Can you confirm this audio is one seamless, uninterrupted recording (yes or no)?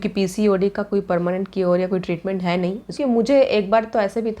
no